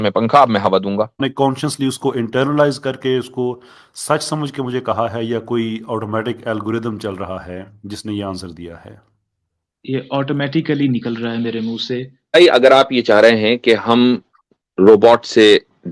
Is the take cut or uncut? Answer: cut